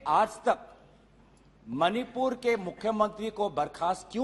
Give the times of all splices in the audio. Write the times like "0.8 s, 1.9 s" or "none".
none